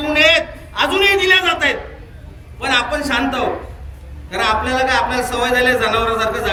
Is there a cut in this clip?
no; 0 cuts

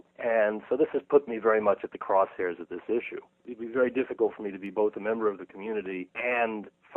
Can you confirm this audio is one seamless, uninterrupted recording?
no; 1 cut; at 5.5 s

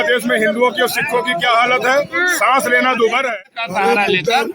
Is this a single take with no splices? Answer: no; 1 cut; at 3.3 s

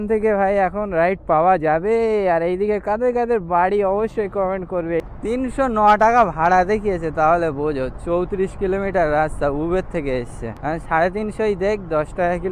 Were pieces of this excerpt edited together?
yes; 2 cuts; at 5.1 s, 10.4 s

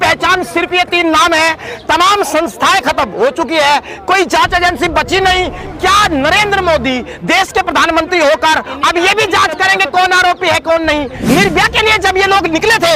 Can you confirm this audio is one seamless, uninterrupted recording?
no; 1 cut; at 11.2 s

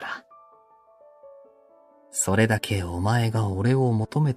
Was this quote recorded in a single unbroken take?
no; 1 cut; at 2.9 s

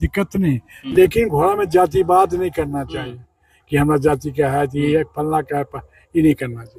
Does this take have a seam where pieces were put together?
no; 0 cuts

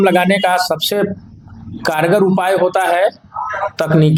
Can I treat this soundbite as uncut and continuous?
yes; 0 cuts

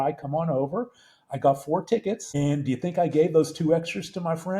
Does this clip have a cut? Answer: yes; 1 cut; at 2.3 s

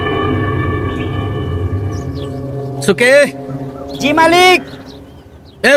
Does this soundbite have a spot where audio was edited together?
no; 0 cuts

